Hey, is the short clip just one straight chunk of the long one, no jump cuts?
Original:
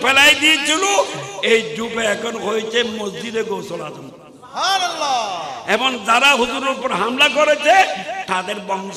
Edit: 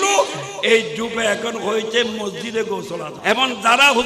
no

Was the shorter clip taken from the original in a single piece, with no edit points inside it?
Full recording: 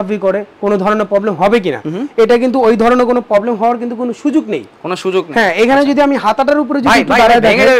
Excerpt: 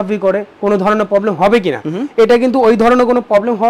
yes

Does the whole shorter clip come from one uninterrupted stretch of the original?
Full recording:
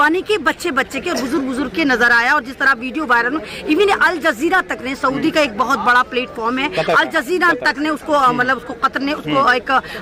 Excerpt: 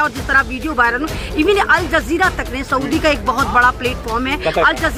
yes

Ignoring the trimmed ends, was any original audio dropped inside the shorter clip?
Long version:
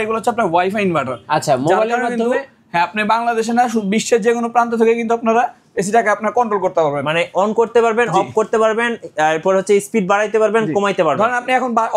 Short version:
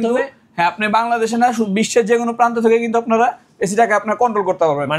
no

